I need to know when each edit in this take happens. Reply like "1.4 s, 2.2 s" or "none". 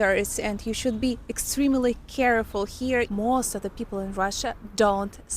3.1 s